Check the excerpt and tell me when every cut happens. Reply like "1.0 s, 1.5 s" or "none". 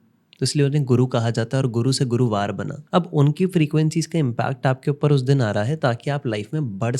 2.7 s